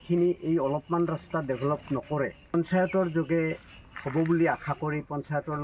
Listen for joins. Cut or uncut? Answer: cut